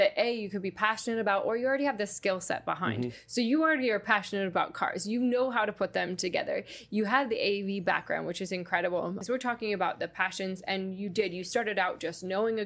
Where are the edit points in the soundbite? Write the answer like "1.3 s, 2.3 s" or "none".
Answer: 9.2 s